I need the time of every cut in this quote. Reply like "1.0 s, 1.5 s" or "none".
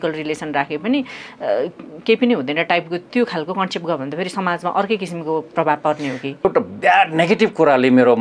6.4 s